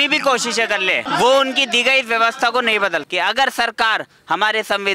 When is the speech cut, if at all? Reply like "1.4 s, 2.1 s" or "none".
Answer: 1.0 s, 3.1 s